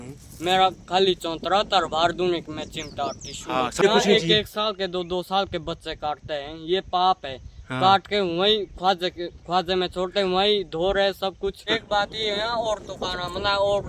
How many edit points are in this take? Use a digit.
2